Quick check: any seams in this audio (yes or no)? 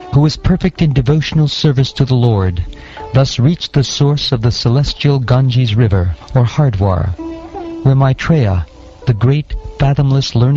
no